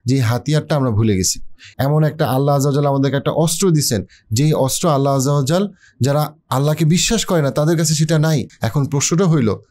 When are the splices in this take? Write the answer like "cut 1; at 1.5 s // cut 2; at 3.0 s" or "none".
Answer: cut 1; at 8.5 s